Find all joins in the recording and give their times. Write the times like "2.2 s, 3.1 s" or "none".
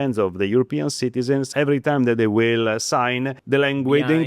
1.5 s, 3.4 s